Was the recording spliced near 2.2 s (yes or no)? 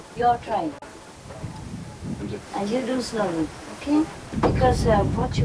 yes